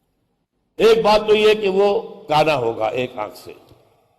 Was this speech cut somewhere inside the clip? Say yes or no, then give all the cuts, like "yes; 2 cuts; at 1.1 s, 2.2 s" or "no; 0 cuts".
yes; 1 cut; at 2.8 s